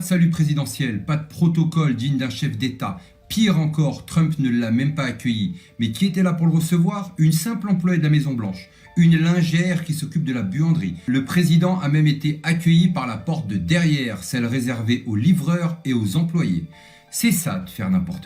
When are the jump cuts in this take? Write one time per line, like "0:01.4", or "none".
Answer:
0:11.0